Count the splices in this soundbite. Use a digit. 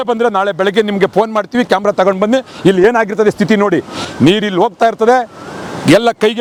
0